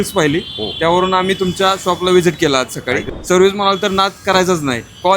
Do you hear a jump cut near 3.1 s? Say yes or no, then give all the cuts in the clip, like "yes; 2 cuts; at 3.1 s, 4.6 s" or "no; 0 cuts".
yes; 1 cut; at 3.1 s